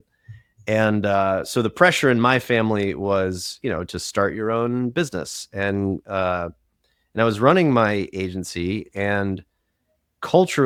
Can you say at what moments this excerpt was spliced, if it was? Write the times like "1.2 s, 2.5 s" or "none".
none